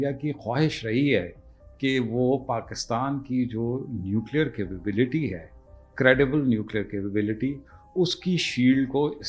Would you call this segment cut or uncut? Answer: uncut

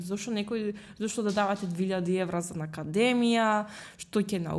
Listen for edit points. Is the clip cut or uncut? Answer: uncut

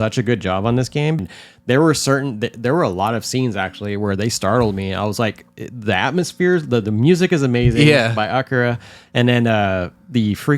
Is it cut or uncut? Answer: cut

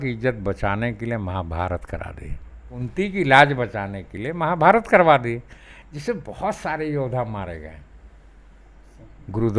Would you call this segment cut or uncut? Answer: uncut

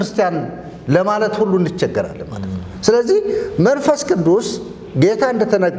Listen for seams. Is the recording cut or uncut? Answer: uncut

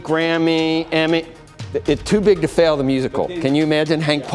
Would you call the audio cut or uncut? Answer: uncut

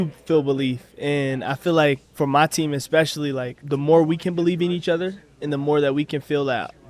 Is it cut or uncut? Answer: cut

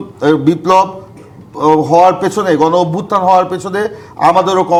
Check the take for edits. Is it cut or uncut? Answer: uncut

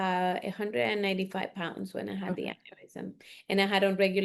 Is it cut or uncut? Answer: uncut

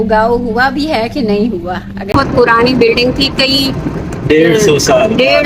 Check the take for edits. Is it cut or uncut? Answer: cut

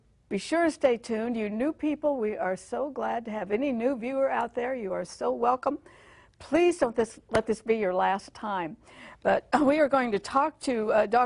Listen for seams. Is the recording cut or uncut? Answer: uncut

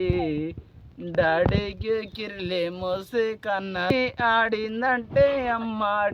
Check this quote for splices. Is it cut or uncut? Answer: cut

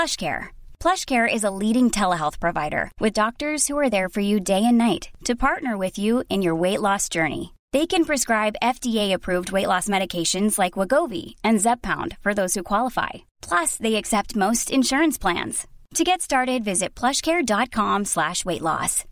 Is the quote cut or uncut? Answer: uncut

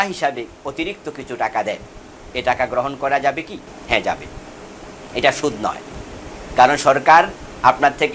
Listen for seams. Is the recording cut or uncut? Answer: uncut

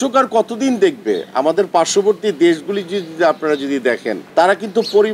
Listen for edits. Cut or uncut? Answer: cut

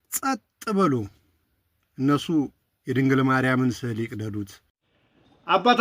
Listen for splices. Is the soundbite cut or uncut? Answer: cut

